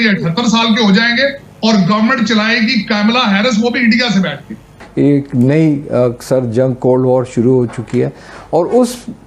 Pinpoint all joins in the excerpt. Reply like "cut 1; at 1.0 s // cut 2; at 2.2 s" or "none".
cut 1; at 4.8 s